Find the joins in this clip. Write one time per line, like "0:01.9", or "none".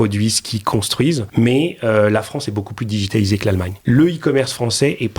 0:01.2
0:03.7